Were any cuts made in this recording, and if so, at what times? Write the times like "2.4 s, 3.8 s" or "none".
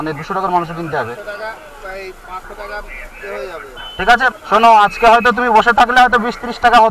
4.3 s